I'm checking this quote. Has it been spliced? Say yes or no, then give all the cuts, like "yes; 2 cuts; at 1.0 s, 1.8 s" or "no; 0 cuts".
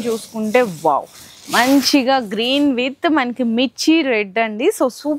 no; 0 cuts